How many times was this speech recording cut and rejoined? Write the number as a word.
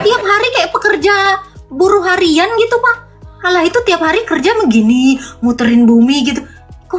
one